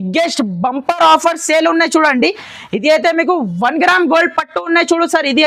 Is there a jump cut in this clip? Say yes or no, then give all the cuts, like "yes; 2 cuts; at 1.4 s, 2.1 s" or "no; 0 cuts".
no; 0 cuts